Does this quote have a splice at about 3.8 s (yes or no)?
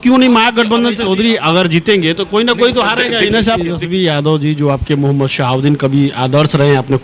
yes